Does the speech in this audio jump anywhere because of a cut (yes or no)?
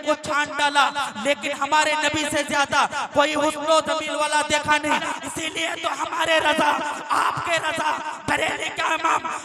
yes